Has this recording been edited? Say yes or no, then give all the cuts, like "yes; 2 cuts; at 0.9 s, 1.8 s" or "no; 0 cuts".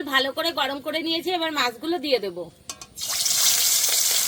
no; 0 cuts